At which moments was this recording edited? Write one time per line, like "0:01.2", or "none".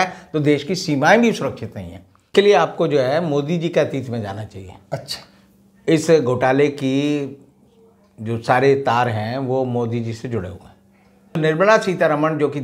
0:02.3
0:11.4